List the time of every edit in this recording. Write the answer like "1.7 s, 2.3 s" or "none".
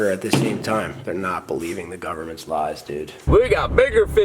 3.2 s